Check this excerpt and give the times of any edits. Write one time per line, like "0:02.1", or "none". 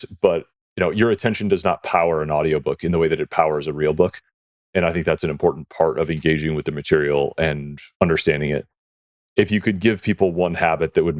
none